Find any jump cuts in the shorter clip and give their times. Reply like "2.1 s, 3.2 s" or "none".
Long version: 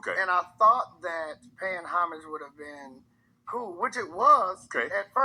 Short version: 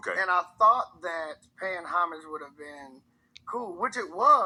none